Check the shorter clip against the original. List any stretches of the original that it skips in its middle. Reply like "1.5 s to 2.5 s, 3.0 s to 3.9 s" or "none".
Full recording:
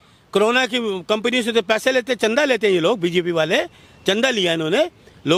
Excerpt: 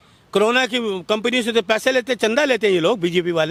none